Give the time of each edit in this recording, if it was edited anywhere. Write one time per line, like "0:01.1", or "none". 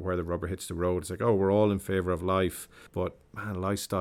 0:02.9